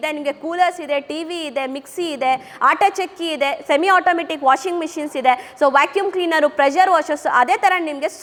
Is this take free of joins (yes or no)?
yes